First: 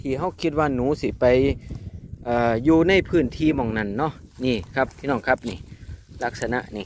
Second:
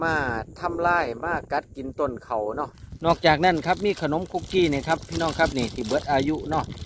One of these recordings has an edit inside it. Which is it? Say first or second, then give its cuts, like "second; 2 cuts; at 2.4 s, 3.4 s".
second; 1 cut; at 2.8 s